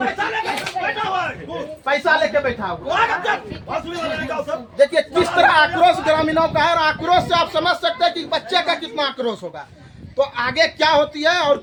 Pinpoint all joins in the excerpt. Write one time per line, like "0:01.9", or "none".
none